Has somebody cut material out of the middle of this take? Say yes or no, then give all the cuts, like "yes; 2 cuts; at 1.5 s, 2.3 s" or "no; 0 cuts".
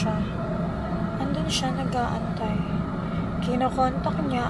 no; 0 cuts